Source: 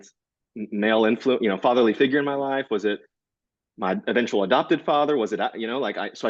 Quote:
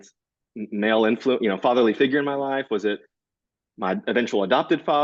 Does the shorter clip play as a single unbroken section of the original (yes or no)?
yes